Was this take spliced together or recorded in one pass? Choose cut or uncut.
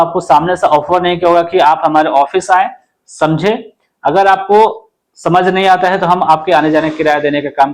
uncut